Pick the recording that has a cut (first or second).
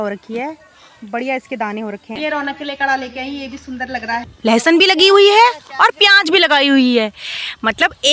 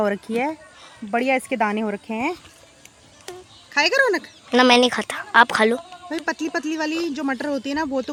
first